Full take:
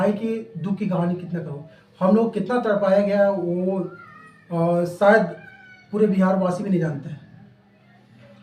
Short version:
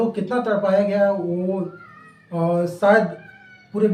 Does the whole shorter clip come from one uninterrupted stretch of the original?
yes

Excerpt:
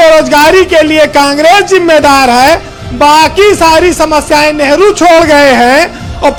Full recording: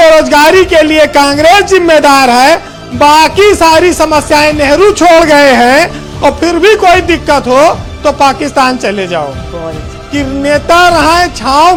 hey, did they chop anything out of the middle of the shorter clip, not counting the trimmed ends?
no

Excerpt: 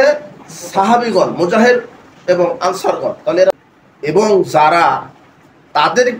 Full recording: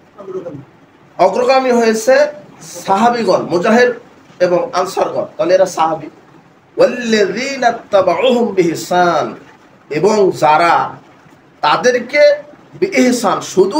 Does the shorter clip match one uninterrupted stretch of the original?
no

